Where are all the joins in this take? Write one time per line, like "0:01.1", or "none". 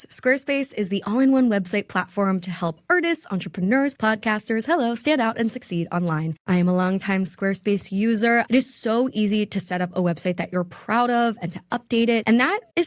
0:06.4
0:08.5